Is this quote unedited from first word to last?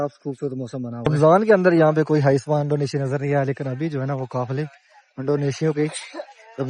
no; 1 cut; at 1.0 s

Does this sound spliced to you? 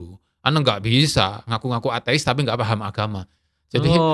no; 0 cuts

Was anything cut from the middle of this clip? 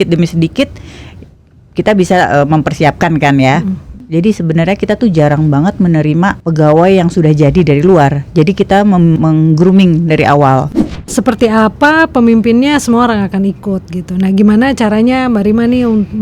yes; 2 cuts; at 3.9 s, 10.8 s

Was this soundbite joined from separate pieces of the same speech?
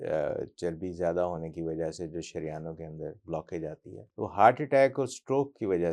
yes; 1 cut; at 4.0 s

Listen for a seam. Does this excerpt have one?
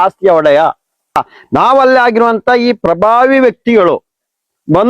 yes; 1 cut; at 1.2 s

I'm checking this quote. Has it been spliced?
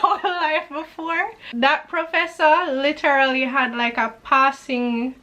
yes; 1 cut; at 1.4 s

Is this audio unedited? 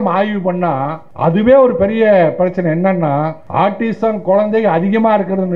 no; 2 cuts; at 1.0 s, 3.4 s

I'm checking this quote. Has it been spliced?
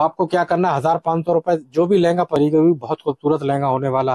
yes; 1 cut; at 2.4 s

